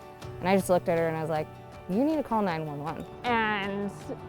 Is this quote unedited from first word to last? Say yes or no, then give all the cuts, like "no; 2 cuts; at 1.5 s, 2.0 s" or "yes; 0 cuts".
no; 1 cut; at 3.1 s